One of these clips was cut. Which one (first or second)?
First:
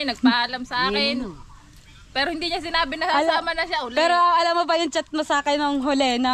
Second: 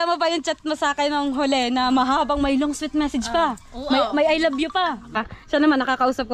second